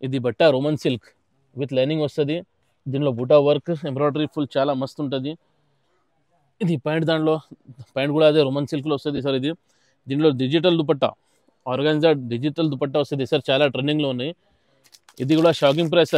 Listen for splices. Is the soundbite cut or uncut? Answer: uncut